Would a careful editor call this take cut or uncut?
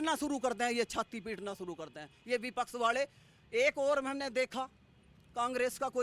uncut